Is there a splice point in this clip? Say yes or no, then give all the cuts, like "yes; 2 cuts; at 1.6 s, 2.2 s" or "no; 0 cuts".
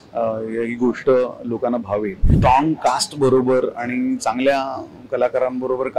yes; 1 cut; at 2.3 s